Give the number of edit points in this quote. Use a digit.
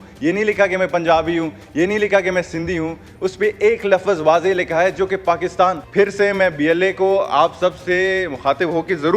1